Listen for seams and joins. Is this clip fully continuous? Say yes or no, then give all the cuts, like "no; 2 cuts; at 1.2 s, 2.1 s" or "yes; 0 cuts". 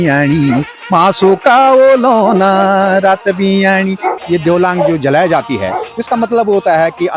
no; 1 cut; at 4.2 s